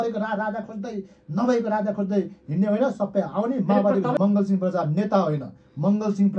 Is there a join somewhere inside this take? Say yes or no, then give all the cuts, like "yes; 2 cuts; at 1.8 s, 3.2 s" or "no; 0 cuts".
yes; 1 cut; at 4.2 s